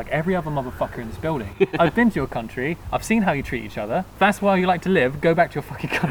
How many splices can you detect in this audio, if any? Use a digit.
2